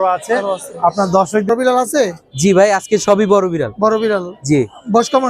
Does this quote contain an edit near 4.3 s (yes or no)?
no